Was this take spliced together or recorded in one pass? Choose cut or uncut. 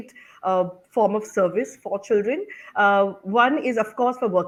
uncut